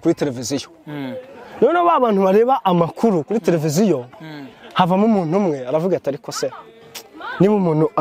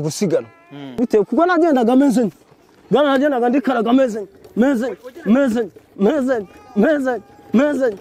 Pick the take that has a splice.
second; 1 cut; at 1.0 s

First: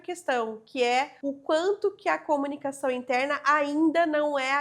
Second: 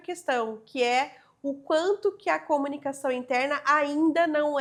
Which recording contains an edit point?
first; 1 cut; at 1.1 s

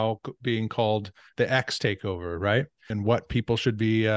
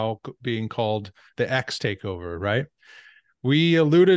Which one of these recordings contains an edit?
first; 1 cut; at 2.8 s

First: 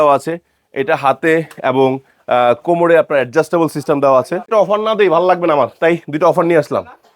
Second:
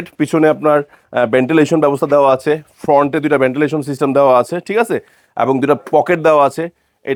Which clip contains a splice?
first; 1 cut; at 4.5 s

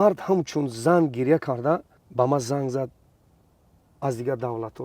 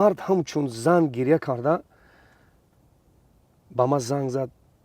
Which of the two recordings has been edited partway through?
first; 1 cut; at 2.0 s

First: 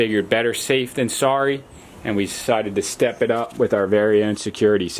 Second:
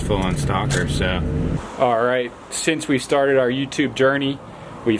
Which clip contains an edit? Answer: second; 1 cut; at 1.6 s

